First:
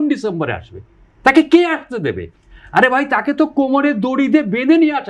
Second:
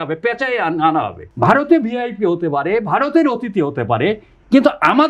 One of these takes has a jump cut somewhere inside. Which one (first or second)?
second